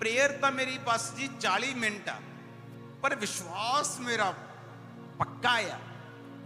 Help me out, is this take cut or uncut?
uncut